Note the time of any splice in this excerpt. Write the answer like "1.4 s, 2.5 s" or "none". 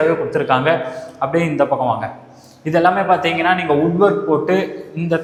none